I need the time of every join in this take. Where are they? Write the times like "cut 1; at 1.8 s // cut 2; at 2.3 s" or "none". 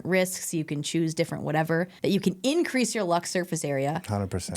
cut 1; at 1.9 s